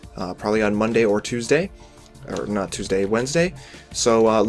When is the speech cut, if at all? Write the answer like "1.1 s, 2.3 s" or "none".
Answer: 1.2 s

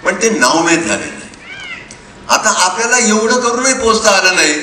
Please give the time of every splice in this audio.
none

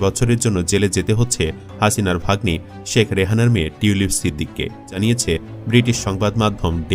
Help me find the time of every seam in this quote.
4.9 s

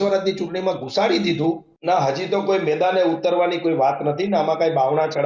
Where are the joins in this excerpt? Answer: 1.7 s

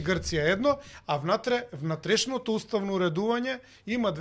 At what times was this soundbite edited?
none

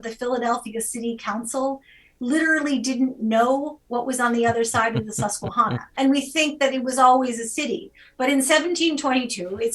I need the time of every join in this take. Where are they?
5.8 s

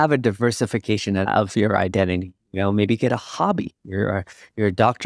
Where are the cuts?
1.2 s

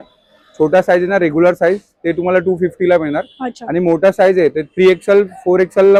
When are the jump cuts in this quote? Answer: none

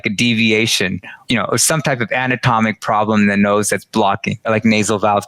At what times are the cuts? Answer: 1.2 s, 4.5 s

